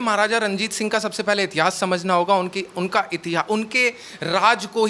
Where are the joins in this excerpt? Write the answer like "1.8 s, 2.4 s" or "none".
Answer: none